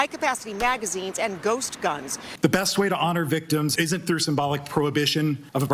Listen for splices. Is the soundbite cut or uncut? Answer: cut